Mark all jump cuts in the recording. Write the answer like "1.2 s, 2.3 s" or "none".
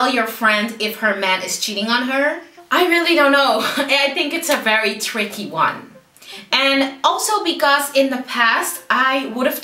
2.5 s